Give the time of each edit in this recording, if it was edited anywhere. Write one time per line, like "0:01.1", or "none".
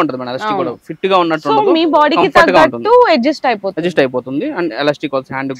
none